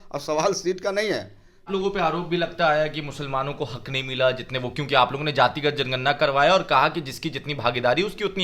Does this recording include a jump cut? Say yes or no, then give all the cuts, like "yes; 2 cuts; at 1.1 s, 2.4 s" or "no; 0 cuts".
yes; 1 cut; at 1.6 s